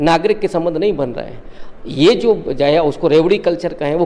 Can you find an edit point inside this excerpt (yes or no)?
no